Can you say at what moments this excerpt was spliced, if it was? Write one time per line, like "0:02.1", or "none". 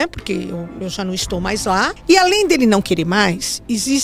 0:02.0